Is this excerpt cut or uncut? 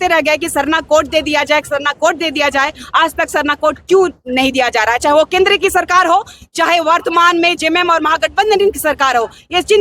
uncut